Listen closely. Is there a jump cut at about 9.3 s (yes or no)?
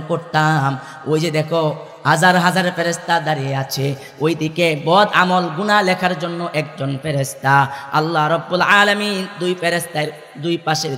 no